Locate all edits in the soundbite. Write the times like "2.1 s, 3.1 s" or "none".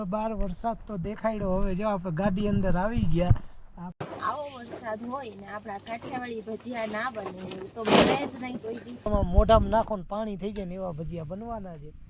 4.0 s, 9.0 s